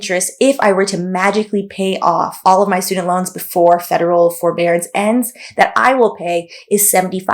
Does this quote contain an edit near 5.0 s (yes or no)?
no